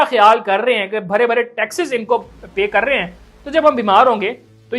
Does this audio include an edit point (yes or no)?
no